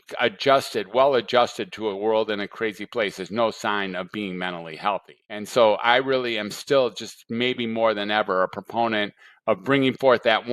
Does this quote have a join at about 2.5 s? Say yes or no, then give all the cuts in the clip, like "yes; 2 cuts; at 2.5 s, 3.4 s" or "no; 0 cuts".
no; 1 cut; at 5.4 s